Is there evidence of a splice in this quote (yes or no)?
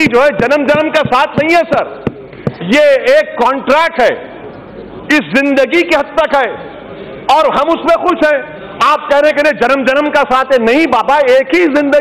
no